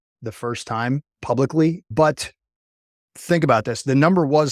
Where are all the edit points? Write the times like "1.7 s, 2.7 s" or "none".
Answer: 1.8 s, 3.0 s